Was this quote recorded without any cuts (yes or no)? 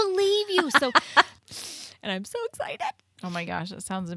no